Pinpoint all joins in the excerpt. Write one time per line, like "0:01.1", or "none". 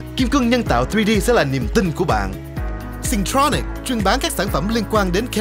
none